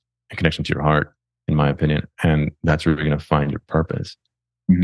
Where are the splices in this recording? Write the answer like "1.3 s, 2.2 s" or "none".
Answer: none